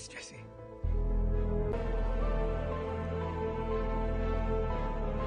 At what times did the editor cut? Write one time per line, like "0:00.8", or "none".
0:01.7